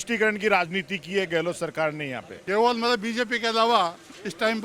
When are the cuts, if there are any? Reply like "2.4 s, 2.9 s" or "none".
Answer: 2.3 s